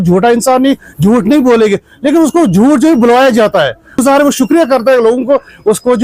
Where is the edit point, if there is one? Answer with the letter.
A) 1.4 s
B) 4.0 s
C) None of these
B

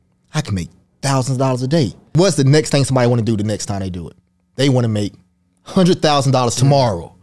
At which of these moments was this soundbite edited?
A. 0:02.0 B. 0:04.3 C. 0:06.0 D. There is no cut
A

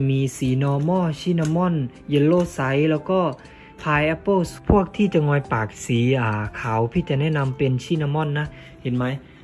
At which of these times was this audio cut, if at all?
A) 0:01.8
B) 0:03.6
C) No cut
C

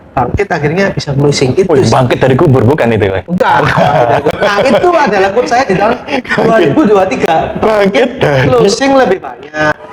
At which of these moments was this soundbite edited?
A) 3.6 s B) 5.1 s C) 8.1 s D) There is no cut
D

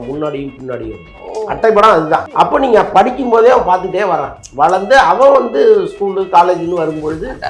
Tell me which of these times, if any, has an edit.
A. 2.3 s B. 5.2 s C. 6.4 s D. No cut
A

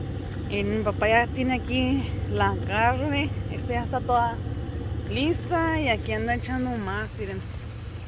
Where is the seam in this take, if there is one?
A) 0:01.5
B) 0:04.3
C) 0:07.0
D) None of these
D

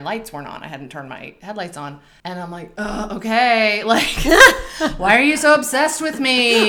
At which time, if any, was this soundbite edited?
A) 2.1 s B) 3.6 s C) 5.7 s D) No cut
A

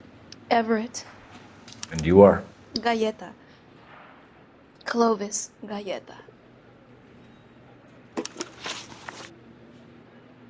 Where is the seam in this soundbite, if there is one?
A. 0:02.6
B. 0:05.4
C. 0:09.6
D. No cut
C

